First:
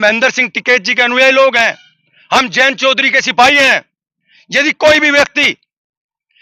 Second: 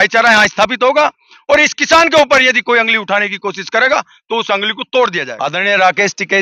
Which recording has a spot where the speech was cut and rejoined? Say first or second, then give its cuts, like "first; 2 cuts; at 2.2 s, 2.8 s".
second; 1 cut; at 5.3 s